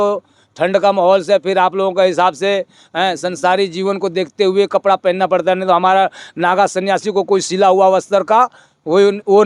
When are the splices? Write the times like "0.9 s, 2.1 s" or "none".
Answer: none